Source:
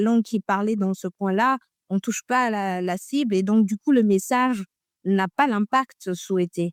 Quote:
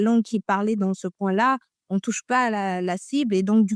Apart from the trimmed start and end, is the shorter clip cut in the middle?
no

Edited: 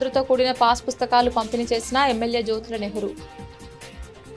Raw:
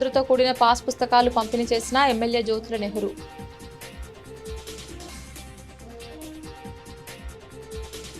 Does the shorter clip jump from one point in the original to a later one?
yes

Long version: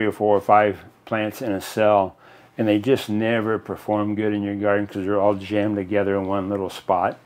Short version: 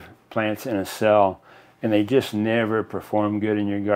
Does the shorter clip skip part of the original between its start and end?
no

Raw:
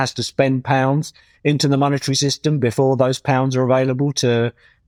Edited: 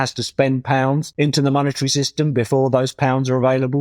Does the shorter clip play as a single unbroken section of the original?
no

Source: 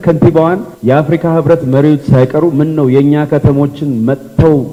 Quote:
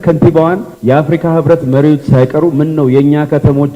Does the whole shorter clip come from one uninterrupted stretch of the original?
yes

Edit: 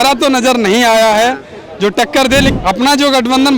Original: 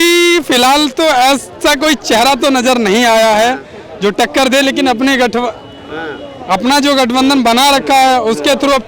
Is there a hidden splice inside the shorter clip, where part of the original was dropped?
yes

